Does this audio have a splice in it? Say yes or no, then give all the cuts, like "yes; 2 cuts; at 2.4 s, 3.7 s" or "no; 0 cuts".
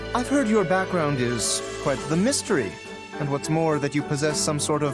no; 0 cuts